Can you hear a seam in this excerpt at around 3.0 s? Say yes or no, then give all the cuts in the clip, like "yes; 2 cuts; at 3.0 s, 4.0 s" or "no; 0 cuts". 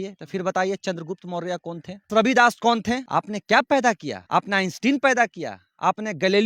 yes; 3 cuts; at 2.1 s, 3.0 s, 4.1 s